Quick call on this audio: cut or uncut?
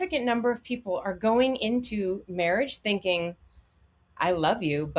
uncut